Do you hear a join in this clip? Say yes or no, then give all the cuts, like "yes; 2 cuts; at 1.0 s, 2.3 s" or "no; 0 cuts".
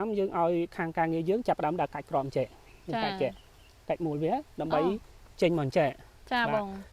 no; 0 cuts